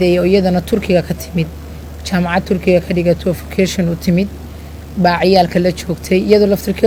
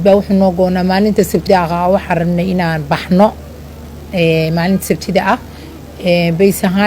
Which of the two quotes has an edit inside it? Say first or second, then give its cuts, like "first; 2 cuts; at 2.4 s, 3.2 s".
second; 1 cut; at 1.3 s